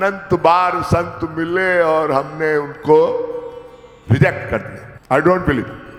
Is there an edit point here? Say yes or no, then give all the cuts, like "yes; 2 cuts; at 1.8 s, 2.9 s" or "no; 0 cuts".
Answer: no; 0 cuts